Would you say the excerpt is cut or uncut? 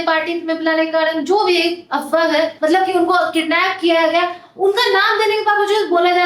uncut